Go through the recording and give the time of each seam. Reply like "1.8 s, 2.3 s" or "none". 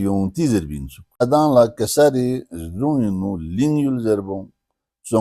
1.2 s